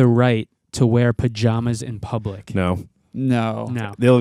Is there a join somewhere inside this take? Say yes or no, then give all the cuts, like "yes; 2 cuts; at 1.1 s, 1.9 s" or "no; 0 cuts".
no; 0 cuts